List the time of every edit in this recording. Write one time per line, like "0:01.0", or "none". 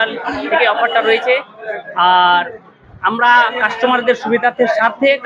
none